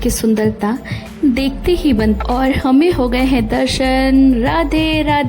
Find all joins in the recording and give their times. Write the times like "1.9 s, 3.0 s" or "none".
2.2 s